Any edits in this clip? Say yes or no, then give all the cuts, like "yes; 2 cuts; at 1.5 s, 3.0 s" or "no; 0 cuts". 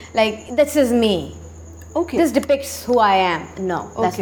no; 0 cuts